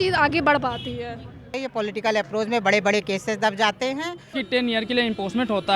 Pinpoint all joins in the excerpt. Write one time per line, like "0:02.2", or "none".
0:01.6
0:04.4